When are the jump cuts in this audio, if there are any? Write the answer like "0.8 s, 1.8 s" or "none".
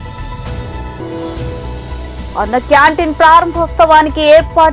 none